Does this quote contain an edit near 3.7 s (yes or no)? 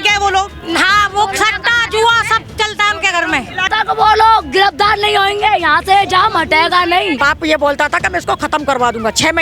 yes